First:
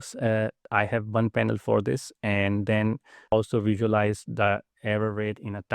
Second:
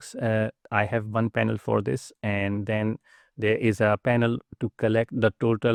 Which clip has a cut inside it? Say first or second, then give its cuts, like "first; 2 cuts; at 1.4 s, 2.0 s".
first; 1 cut; at 3.2 s